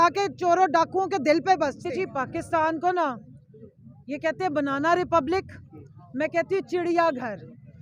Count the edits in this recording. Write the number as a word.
one